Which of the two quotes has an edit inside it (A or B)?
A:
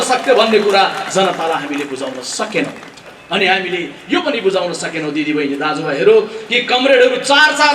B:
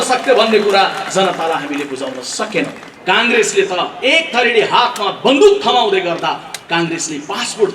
B